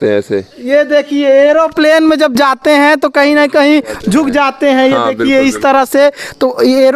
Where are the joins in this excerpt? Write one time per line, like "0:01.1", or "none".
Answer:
none